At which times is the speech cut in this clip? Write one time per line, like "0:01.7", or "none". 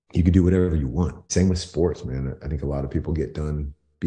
0:01.3